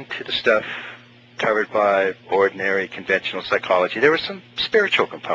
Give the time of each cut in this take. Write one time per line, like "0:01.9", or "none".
0:02.3